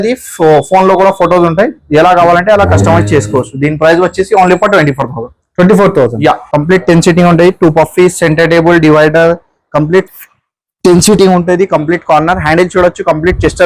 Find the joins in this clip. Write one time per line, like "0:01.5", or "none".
0:06.5

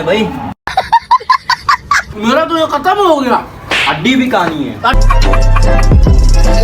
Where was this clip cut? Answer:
0:02.1

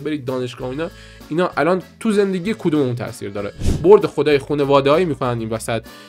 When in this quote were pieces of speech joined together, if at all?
0:03.6

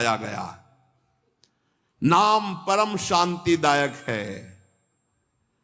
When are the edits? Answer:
none

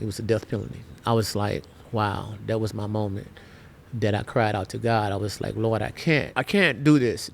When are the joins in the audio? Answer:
0:00.9
0:06.3

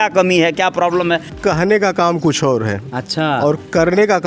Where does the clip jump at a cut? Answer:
0:01.3

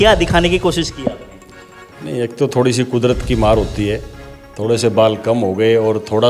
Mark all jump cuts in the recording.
none

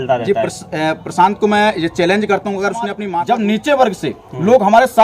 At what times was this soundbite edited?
0:03.0

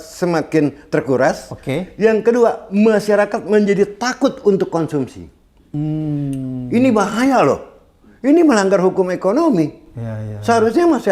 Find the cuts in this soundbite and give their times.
none

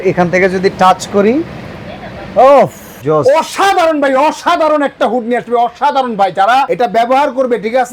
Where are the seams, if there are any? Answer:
0:02.9
0:06.7

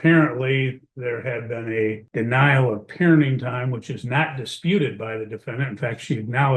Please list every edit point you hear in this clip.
0:02.0

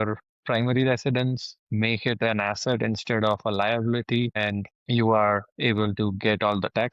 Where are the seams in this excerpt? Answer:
none

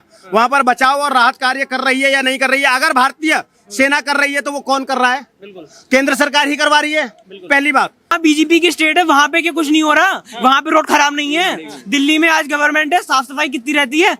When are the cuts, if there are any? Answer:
0:08.1

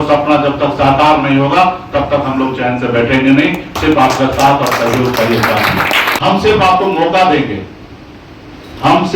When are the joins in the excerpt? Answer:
0:06.1

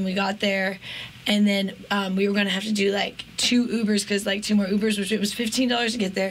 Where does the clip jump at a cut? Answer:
none

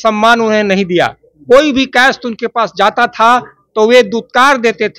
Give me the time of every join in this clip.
none

